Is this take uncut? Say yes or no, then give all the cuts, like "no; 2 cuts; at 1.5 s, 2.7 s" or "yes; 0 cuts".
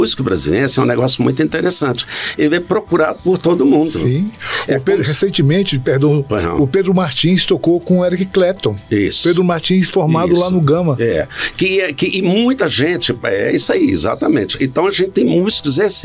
yes; 0 cuts